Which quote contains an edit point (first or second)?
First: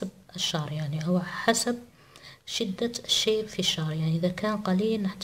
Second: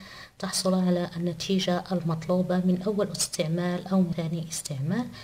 second